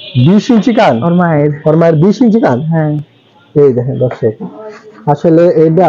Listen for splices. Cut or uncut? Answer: uncut